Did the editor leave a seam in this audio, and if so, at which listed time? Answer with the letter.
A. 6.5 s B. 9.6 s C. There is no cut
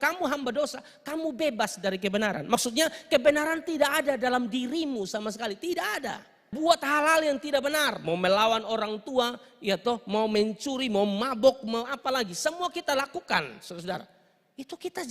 A